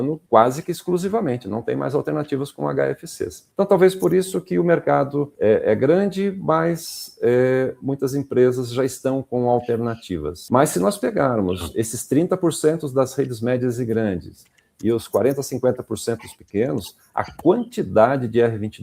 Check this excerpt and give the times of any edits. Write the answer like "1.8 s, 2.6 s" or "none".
none